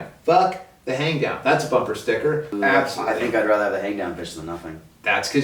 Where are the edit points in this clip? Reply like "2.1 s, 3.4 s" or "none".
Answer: 2.5 s